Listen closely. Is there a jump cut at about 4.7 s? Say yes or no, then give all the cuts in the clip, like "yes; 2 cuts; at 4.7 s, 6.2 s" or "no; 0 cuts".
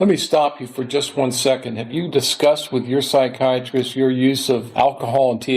yes; 1 cut; at 4.7 s